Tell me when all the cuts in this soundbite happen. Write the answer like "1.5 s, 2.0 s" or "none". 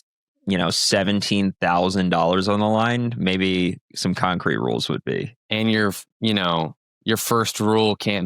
5.4 s